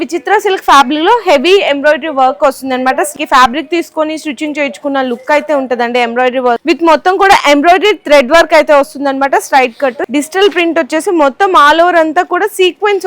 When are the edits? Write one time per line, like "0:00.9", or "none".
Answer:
0:03.1
0:06.6
0:10.0